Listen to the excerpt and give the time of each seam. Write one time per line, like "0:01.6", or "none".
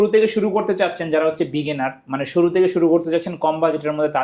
none